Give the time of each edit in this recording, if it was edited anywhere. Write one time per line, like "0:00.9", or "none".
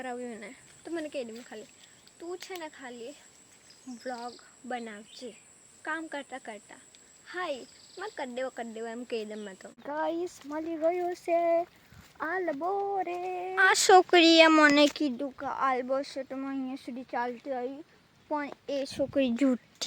0:09.8
0:13.6